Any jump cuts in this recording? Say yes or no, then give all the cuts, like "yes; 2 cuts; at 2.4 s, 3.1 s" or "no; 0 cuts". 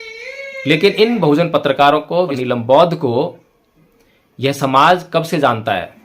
yes; 1 cut; at 2.4 s